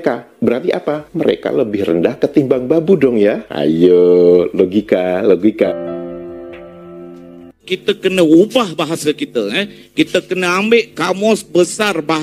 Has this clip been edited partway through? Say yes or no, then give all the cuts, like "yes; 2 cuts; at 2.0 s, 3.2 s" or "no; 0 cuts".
yes; 2 cuts; at 5.7 s, 7.7 s